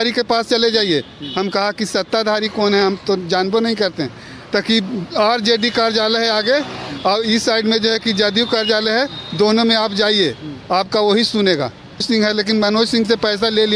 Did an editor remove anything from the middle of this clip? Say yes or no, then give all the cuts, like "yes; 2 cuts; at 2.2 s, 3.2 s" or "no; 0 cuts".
yes; 1 cut; at 12.1 s